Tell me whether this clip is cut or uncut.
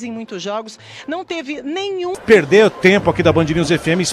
cut